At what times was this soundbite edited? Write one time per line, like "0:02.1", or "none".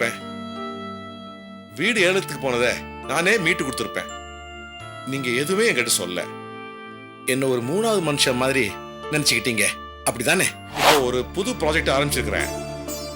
0:10.7